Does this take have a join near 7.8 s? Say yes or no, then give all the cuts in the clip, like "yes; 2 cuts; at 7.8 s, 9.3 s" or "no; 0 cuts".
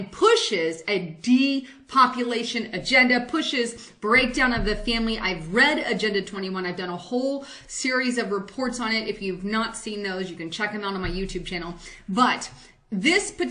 yes; 1 cut; at 7.8 s